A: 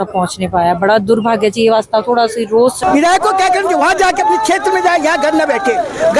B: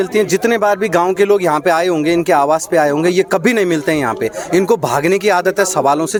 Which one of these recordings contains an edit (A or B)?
A